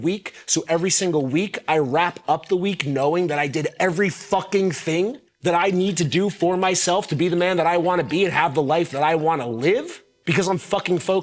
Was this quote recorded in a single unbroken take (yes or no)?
yes